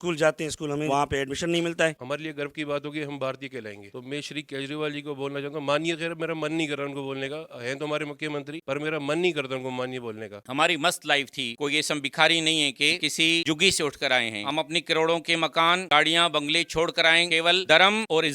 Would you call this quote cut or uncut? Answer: cut